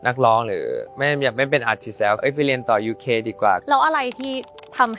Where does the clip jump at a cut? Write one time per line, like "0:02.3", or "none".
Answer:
0:02.2
0:03.6